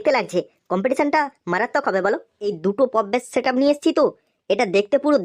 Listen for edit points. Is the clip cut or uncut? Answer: cut